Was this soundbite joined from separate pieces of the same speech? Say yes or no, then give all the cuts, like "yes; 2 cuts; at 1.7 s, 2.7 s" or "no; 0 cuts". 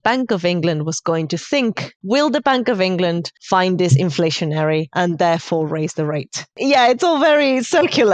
yes; 4 cuts; at 1.9 s, 3.3 s, 4.9 s, 6.6 s